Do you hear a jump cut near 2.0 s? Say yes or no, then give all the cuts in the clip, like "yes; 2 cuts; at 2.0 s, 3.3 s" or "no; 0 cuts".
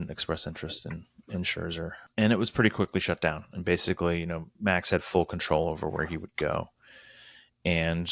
yes; 1 cut; at 2.0 s